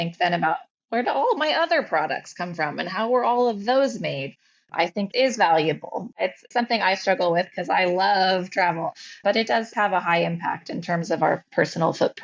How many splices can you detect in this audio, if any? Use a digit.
2